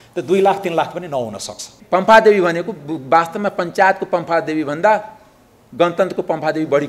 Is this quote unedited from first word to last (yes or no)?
no